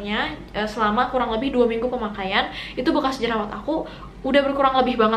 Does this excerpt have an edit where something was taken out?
no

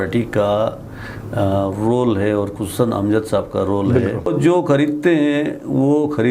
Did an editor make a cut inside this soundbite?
yes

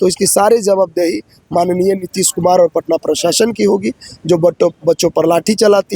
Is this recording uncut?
yes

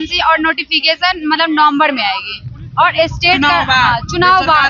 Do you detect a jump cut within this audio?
no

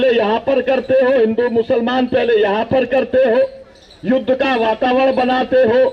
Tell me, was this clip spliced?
no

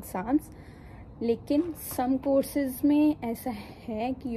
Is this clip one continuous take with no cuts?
yes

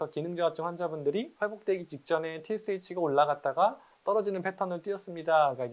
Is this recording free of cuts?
yes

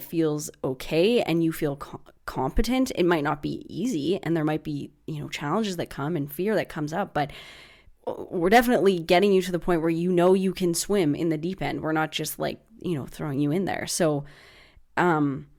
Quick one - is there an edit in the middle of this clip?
no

